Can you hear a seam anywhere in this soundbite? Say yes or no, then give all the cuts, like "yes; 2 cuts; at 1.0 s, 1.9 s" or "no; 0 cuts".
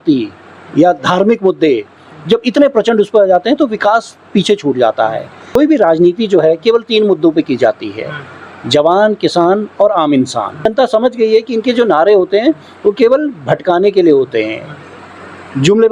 yes; 2 cuts; at 5.6 s, 10.7 s